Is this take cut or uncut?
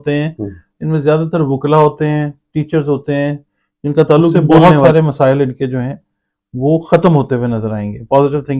cut